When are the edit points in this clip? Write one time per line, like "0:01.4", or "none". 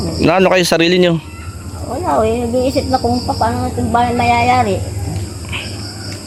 none